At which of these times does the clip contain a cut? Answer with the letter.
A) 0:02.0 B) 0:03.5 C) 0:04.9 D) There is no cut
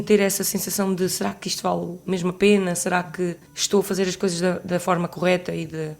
B